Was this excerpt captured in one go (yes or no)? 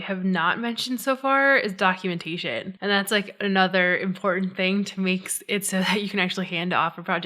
no